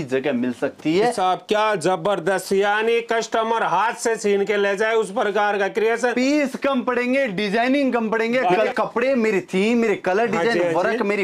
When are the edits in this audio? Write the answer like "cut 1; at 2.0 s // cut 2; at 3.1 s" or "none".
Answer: cut 1; at 1.2 s // cut 2; at 8.7 s